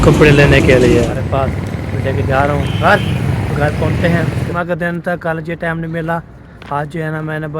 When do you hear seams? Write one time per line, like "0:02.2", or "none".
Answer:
0:01.2
0:04.5

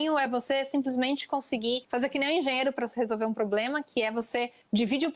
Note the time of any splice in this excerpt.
0:01.8

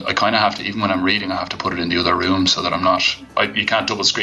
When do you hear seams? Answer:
0:03.2

